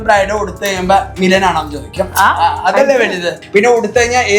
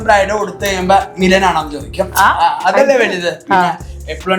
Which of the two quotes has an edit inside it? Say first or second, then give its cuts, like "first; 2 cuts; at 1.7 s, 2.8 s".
first; 1 cut; at 3.4 s